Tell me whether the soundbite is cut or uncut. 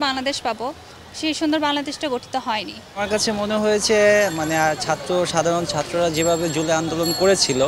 cut